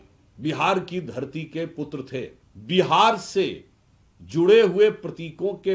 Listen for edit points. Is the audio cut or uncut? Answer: cut